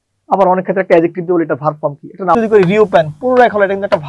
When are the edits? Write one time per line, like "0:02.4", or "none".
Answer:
0:02.3